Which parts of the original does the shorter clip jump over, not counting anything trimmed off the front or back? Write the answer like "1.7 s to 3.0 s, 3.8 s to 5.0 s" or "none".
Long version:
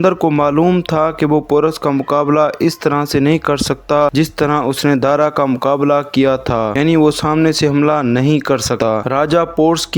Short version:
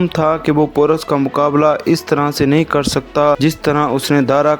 none